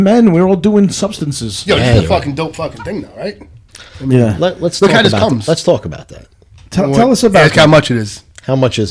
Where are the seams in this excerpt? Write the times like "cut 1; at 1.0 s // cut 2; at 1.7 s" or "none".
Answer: none